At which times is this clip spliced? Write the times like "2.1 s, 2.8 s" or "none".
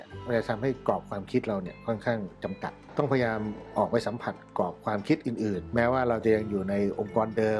2.8 s, 5.6 s